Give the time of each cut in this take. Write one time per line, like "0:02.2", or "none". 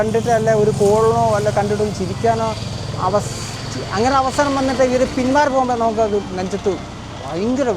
none

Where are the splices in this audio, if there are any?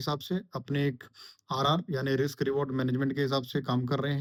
none

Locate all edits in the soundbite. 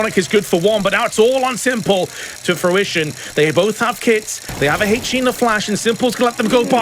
0:02.2

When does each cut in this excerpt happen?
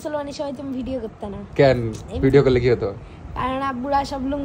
none

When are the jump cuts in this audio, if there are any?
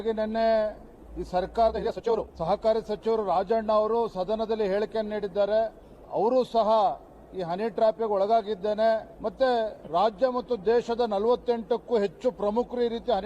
0:02.0

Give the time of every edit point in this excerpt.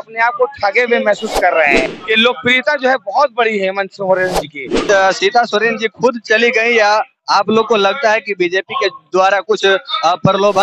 0:01.9
0:04.8

